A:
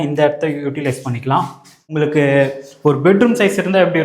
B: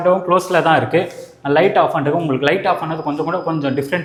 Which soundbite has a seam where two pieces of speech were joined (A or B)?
A